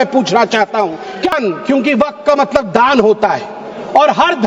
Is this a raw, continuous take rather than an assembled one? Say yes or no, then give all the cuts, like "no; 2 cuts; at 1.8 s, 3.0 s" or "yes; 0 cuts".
no; 1 cut; at 1.3 s